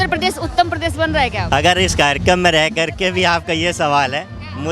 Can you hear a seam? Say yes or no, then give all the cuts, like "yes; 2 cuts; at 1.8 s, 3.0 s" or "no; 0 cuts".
yes; 1 cut; at 1.5 s